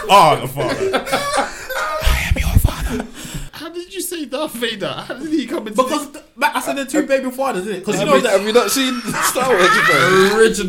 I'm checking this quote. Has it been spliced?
yes; 1 cut; at 3.5 s

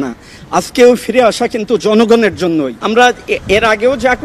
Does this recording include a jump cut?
yes; 1 cut; at 2.8 s

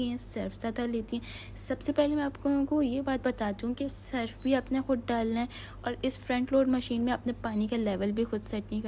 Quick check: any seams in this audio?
no; 0 cuts

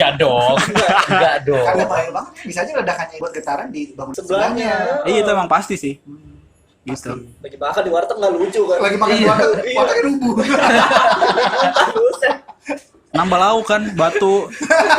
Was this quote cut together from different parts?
yes; 2 cuts; at 3.1 s, 4.1 s

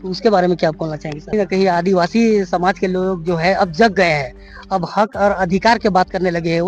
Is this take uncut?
no; 1 cut; at 1.3 s

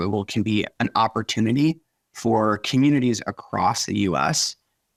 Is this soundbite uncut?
yes; 0 cuts

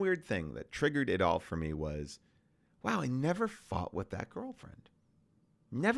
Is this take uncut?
yes; 0 cuts

